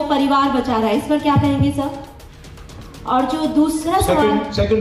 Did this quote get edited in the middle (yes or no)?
no